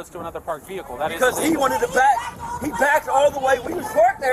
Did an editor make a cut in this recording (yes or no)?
yes